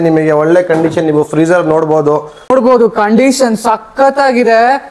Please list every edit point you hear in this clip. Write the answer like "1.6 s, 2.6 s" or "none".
2.5 s